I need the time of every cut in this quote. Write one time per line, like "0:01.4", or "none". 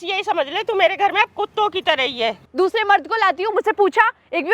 0:02.4